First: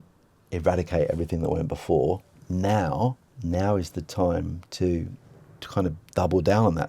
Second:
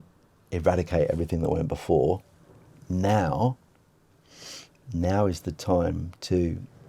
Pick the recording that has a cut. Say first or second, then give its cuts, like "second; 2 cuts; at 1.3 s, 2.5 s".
first; 2 cuts; at 2.4 s, 3.3 s